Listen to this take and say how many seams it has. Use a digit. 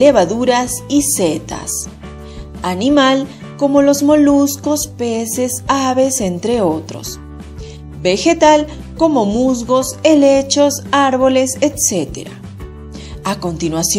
1